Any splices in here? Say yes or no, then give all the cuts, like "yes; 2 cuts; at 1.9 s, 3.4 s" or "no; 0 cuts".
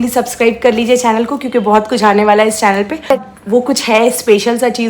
yes; 1 cut; at 3.3 s